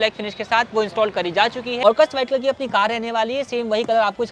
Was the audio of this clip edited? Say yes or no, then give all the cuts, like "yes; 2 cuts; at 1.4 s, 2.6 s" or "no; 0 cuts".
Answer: yes; 1 cut; at 1.8 s